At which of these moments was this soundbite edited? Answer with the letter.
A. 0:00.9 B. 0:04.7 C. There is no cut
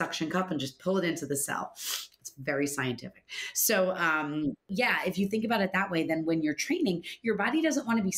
B